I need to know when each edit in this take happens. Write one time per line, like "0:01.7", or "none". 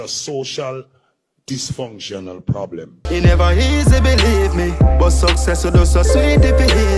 0:03.0